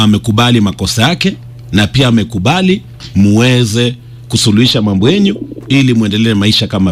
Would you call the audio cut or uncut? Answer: uncut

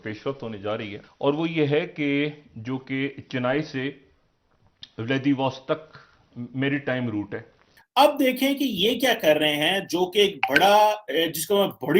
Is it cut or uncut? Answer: cut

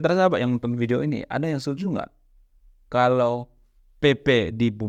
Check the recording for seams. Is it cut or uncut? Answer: uncut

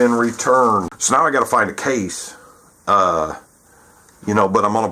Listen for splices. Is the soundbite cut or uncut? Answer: cut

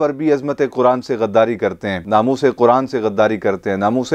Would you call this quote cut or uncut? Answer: cut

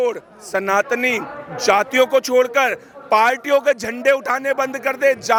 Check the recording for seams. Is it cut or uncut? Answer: uncut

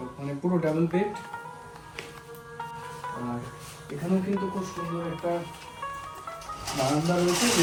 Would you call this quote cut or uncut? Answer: uncut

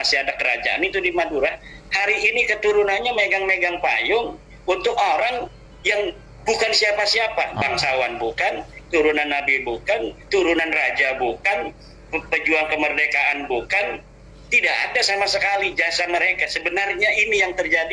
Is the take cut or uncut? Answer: uncut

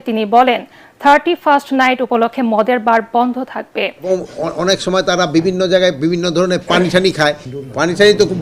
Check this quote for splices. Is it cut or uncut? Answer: cut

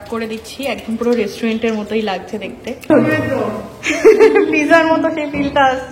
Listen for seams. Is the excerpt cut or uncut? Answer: cut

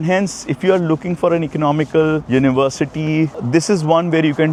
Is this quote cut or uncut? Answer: uncut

